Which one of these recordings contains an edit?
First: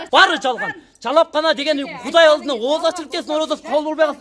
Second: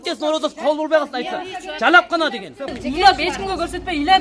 second; 1 cut; at 2.8 s

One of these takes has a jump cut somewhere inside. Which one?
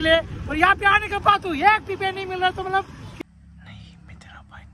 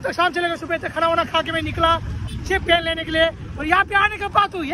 first; 1 cut; at 3.1 s

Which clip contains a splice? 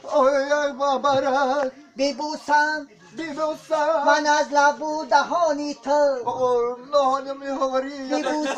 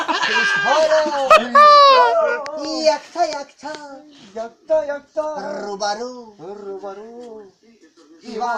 second; 1 cut; at 3.9 s

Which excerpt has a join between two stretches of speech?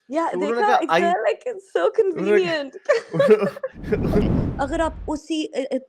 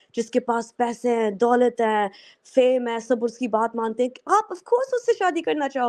first; 1 cut; at 4.2 s

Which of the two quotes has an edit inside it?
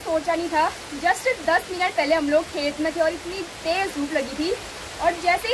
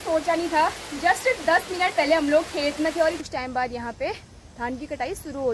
second; 1 cut; at 3.2 s

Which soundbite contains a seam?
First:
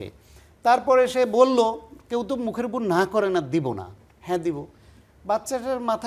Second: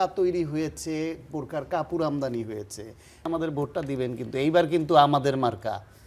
second; 1 cut; at 3.3 s

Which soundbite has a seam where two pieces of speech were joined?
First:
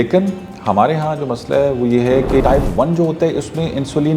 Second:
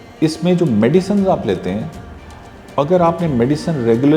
first; 1 cut; at 2.4 s

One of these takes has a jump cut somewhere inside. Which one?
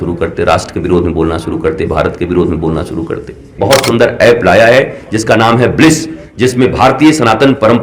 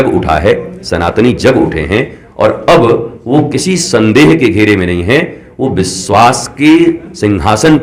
first; 1 cut; at 3.6 s

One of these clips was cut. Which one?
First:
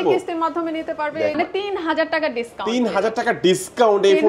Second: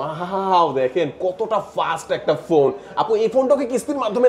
first; 1 cut; at 1.4 s

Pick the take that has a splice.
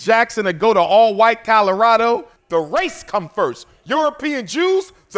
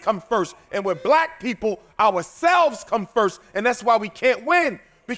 first; 1 cut; at 2.3 s

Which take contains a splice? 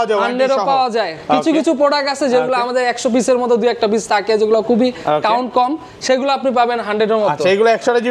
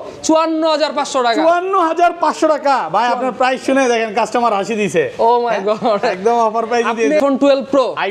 second; 1 cut; at 7.2 s

